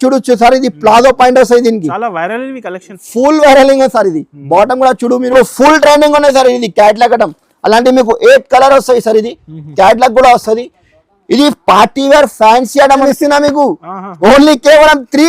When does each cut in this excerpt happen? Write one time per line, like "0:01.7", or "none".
0:05.3
0:13.1